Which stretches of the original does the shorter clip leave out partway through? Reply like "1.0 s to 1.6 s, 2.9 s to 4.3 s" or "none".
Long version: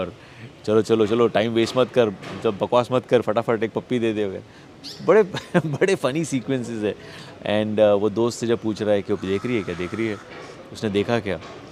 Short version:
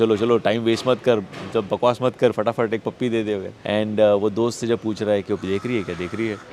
4.4 s to 7.3 s